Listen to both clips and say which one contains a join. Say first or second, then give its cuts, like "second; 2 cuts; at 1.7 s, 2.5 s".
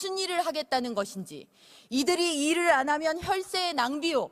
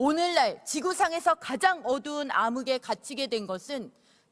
second; 1 cut; at 2.3 s